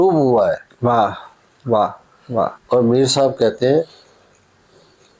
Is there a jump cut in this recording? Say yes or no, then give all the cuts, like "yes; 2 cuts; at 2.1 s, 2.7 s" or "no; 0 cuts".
no; 0 cuts